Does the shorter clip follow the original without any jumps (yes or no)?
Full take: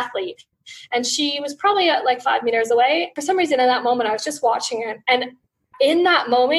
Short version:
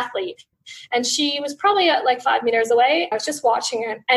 no